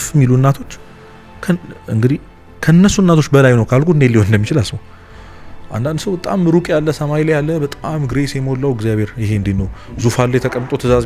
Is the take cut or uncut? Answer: uncut